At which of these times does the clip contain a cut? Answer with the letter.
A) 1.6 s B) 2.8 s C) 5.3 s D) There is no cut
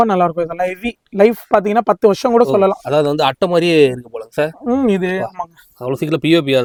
D